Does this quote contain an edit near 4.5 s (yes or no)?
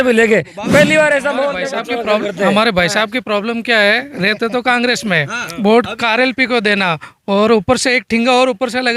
no